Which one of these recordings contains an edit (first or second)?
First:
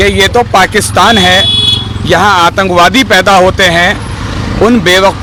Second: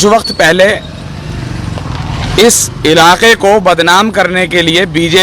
second